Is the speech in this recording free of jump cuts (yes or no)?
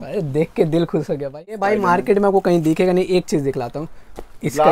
no